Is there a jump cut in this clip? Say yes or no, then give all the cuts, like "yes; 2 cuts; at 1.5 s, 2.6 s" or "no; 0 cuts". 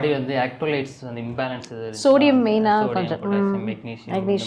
no; 0 cuts